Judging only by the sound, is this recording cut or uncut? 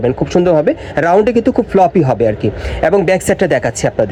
uncut